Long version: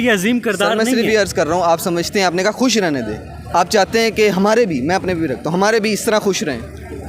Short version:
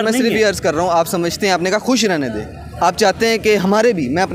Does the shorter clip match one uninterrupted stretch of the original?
yes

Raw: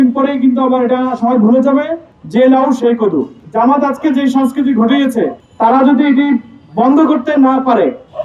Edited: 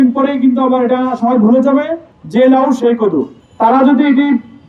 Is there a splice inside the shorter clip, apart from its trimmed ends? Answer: yes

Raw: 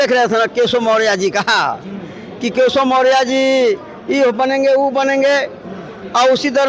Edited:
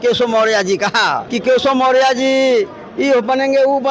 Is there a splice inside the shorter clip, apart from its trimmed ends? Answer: yes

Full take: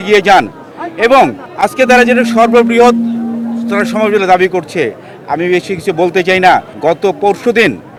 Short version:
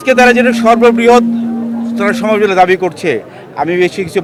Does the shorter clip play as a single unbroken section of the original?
yes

